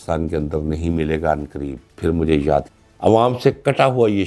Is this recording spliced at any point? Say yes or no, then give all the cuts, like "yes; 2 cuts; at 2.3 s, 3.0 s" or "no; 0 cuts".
yes; 1 cut; at 2.7 s